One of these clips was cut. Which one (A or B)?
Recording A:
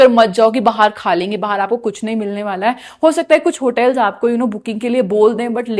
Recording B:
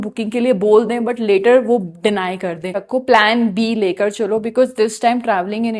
B